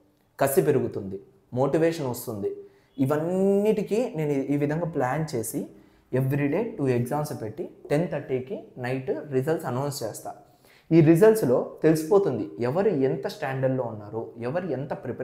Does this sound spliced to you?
no; 0 cuts

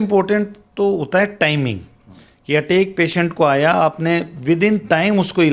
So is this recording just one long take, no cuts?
yes; 0 cuts

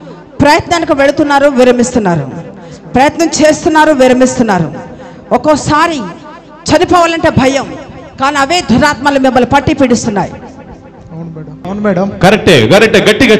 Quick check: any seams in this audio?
yes; 1 cut; at 11.6 s

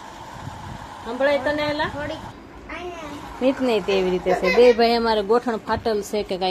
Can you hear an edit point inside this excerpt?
yes; 1 cut; at 2.3 s

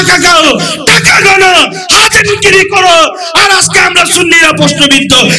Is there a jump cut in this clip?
no; 0 cuts

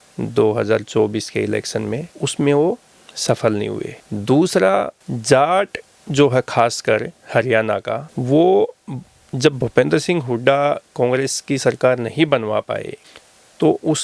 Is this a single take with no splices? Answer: yes; 0 cuts

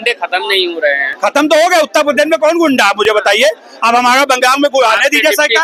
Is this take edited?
no; 0 cuts

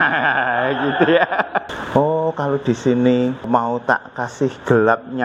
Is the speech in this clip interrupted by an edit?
yes; 2 cuts; at 1.7 s, 3.4 s

